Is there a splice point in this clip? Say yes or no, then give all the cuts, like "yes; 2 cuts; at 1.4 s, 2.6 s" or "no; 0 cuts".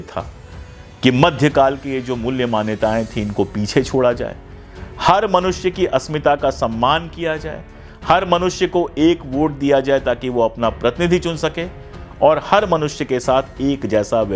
no; 0 cuts